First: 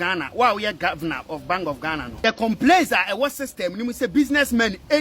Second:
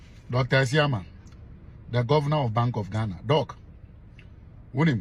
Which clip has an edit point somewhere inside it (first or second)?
first